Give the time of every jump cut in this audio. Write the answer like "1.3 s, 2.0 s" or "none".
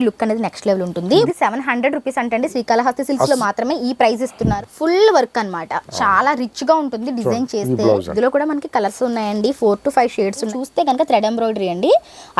1.3 s, 4.6 s, 8.1 s, 10.5 s